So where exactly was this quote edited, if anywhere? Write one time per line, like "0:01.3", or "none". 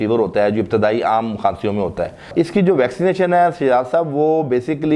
0:02.3